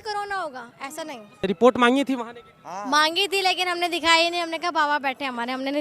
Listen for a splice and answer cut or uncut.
cut